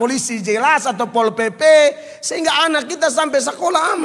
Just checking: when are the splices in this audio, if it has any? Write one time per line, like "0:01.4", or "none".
none